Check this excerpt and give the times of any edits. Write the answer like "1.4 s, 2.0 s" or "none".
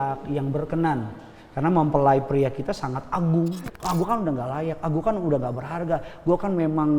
3.7 s